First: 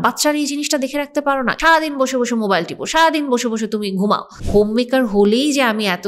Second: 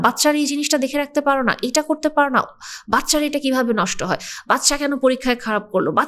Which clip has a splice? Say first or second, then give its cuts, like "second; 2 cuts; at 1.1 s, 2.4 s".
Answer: first; 2 cuts; at 1.5 s, 4.3 s